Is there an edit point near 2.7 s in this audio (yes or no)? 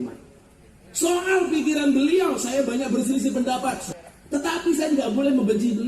no